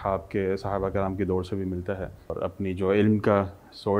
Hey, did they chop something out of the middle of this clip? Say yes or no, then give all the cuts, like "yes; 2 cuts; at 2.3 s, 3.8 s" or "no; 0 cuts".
yes; 1 cut; at 2.3 s